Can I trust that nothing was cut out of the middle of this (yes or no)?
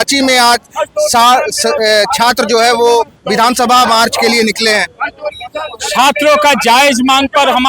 yes